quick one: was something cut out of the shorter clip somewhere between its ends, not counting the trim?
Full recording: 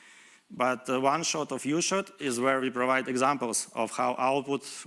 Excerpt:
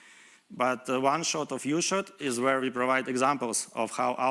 no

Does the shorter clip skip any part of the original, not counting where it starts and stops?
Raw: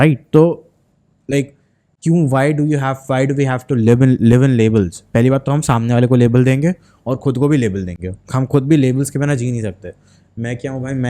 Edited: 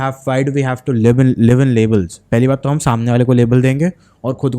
no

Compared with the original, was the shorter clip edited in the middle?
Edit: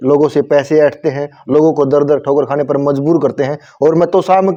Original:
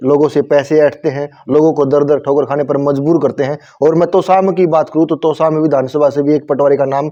no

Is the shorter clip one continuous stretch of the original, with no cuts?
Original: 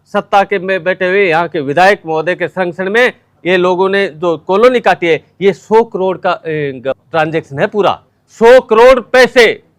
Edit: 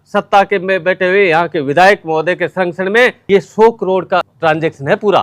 no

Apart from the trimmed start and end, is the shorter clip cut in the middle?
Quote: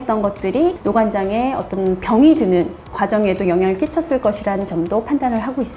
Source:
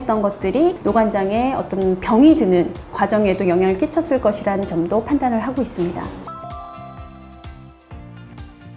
no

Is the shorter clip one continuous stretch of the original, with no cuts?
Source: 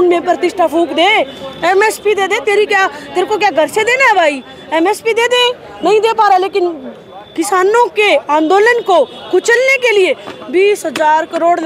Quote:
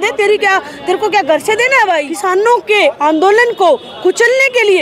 no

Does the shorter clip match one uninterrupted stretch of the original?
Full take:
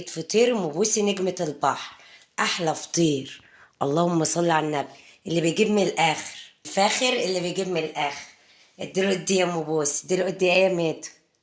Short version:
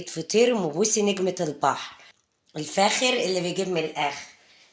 no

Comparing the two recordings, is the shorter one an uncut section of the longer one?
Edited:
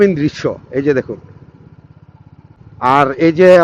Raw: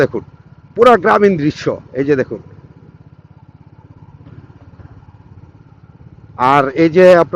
no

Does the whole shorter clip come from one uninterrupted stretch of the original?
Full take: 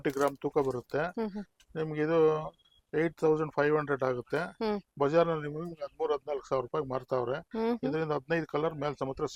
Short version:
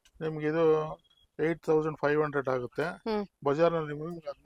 yes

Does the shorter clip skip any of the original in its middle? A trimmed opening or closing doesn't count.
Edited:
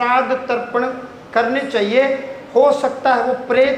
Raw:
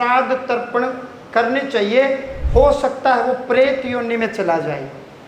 no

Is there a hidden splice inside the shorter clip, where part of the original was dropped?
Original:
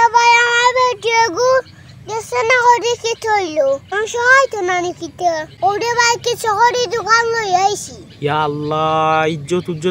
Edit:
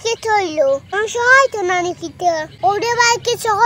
no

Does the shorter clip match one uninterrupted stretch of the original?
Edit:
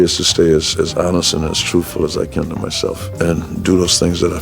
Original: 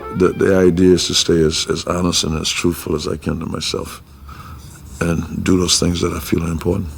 no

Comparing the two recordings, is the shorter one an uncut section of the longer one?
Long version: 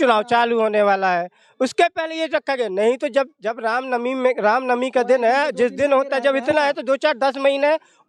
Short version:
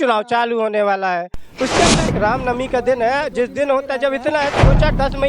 no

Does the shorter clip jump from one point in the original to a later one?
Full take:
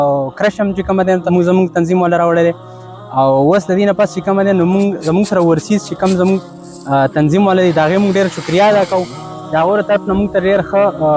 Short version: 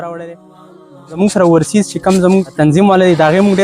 yes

